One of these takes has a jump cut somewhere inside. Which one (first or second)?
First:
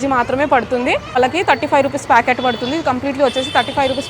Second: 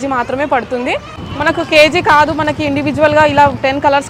first